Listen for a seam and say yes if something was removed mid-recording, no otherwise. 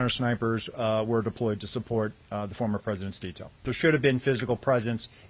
yes